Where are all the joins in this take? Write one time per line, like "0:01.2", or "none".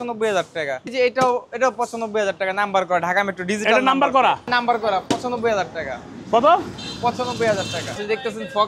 0:00.9
0:04.5
0:07.9